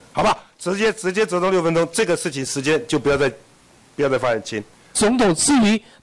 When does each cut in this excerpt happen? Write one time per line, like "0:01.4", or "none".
0:05.0